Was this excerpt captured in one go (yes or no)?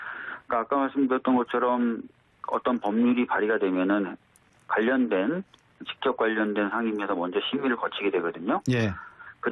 yes